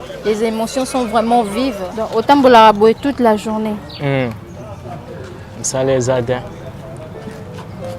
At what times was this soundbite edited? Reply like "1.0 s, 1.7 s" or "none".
1.9 s